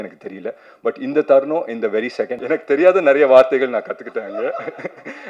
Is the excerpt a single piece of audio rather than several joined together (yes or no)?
no